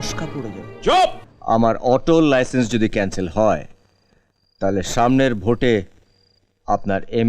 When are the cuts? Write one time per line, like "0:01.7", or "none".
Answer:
0:01.3

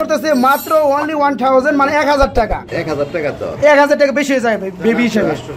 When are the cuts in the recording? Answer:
0:02.6

